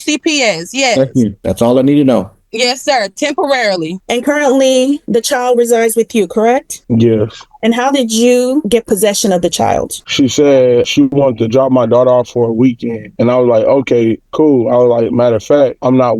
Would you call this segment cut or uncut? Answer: cut